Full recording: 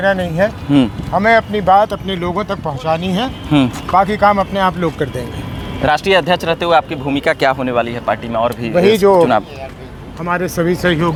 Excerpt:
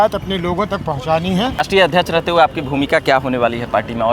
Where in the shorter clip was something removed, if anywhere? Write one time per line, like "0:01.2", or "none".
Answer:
0:01.6